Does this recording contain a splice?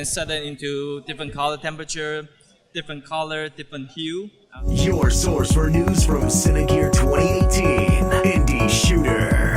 yes; 1 cut; at 4.6 s

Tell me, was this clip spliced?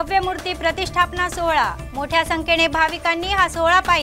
no; 0 cuts

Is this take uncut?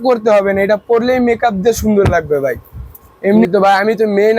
no; 1 cut; at 3.4 s

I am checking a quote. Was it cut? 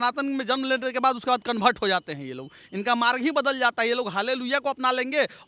no; 0 cuts

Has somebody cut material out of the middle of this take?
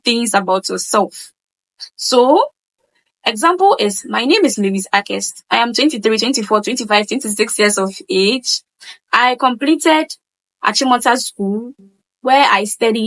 yes; 1 cut; at 10.6 s

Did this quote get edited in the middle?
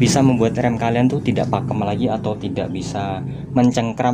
no; 0 cuts

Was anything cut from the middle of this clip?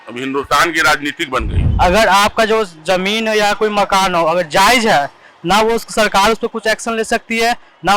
yes; 1 cut; at 1.6 s

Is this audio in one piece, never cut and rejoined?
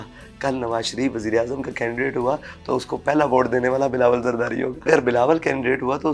no; 1 cut; at 4.9 s

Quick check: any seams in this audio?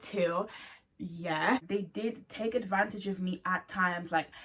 yes; 1 cut; at 1.7 s

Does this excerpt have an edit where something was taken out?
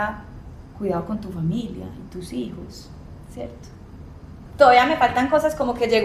yes; 1 cut; at 4.5 s

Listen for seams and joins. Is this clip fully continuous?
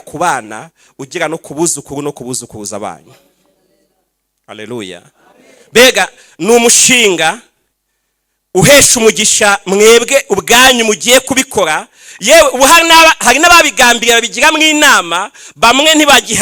yes; 0 cuts

